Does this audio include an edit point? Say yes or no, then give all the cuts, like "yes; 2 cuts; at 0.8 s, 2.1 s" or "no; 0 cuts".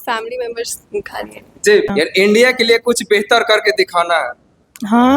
yes; 1 cut; at 1.9 s